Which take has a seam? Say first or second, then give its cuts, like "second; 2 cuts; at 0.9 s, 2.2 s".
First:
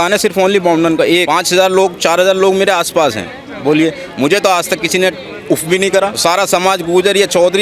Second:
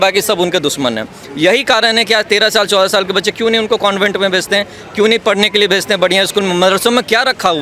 first; 2 cuts; at 1.3 s, 6.1 s